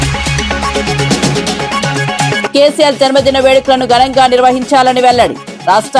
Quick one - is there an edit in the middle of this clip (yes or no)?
yes